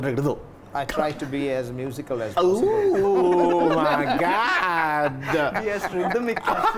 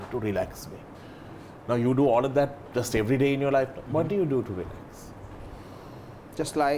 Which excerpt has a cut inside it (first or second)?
second